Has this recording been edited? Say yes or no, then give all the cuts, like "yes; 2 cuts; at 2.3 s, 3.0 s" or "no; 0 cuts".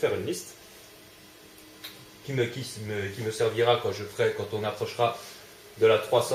no; 0 cuts